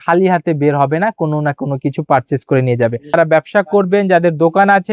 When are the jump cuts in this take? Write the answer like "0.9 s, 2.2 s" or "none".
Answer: 3.2 s